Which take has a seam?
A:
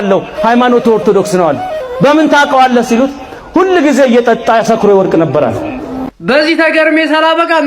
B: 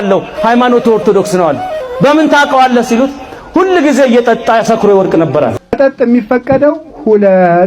B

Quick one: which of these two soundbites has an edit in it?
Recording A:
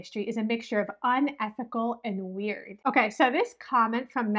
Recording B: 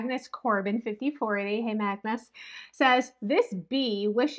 A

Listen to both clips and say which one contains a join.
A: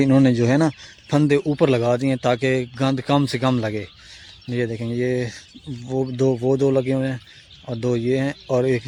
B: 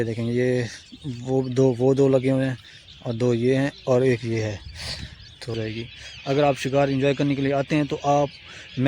B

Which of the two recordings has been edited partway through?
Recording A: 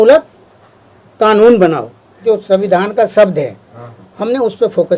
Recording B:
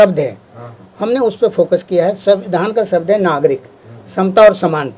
A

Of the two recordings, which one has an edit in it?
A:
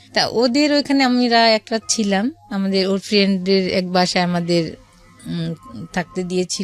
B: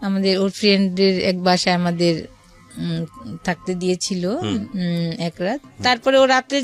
B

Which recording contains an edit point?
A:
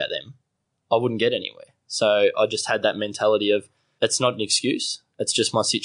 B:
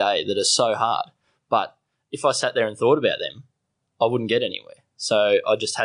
A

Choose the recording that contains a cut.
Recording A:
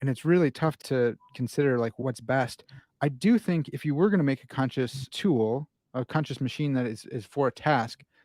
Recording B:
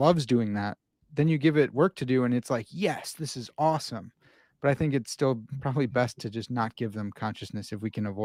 A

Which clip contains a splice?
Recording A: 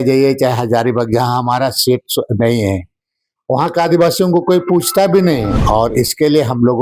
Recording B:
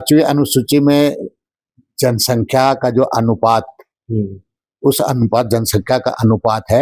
A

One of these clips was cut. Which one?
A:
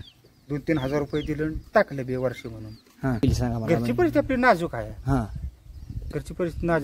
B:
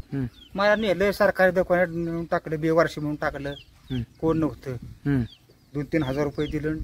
A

